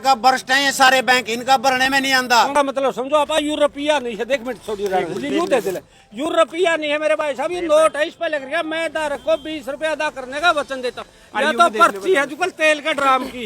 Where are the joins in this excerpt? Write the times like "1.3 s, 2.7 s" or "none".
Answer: 2.5 s